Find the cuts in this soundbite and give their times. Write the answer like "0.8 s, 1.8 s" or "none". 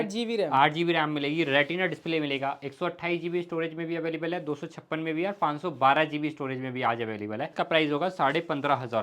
7.5 s